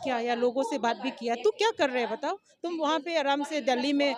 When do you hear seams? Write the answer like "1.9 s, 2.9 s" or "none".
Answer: none